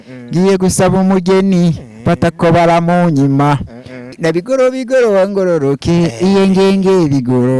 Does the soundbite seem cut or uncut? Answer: cut